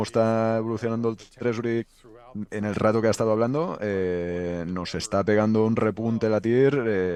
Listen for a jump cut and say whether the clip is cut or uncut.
uncut